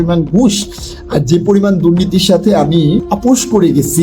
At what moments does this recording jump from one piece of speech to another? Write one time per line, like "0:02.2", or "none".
0:03.1